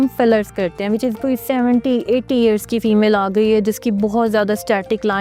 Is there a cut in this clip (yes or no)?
yes